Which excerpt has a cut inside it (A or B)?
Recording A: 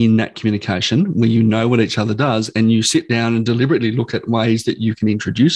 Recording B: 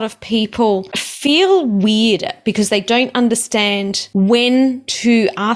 B